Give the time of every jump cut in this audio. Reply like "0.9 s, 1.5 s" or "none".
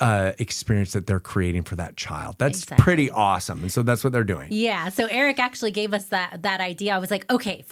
none